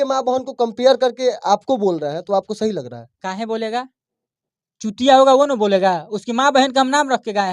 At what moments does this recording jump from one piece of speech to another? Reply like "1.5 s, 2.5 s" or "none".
none